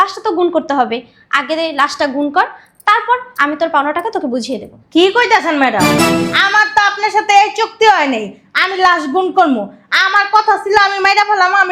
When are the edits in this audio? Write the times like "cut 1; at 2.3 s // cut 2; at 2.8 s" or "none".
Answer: none